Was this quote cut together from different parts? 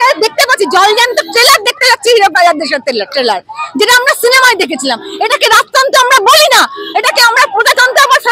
no; 0 cuts

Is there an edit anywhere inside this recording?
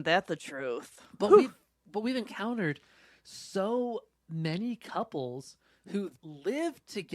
yes; 1 cut; at 6.1 s

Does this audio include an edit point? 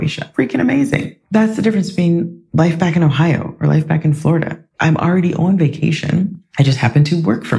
no; 0 cuts

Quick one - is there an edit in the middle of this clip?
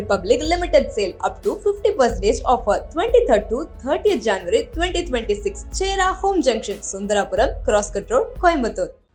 no; 0 cuts

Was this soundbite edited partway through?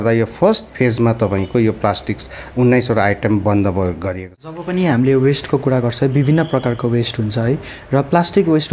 yes; 1 cut; at 4.6 s

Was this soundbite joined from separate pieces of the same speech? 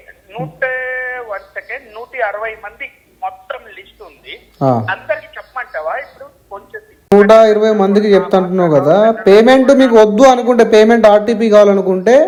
no; 0 cuts

